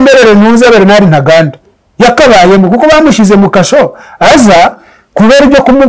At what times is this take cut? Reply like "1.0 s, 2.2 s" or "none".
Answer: none